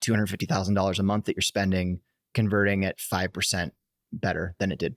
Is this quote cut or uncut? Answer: uncut